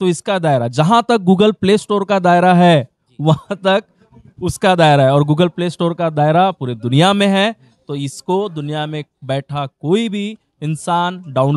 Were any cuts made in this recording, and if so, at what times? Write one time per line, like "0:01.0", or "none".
none